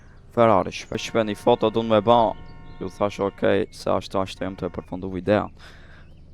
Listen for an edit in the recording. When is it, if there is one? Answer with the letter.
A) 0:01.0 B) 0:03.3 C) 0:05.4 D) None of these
A